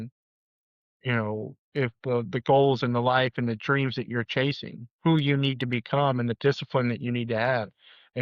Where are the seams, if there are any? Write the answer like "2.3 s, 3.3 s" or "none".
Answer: none